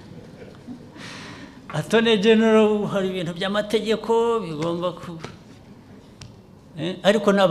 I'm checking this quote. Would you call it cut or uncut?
uncut